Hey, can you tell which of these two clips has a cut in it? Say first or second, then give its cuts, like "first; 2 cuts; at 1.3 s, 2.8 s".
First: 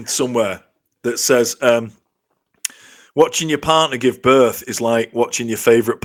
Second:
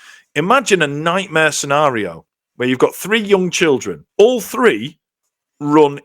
second; 1 cut; at 4.0 s